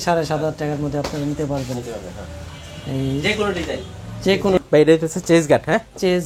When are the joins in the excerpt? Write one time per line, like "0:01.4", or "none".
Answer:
0:04.6